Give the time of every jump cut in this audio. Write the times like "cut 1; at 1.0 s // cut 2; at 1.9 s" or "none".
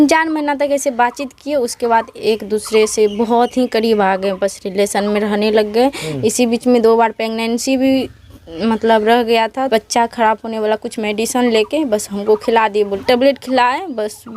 cut 1; at 9.7 s // cut 2; at 12.9 s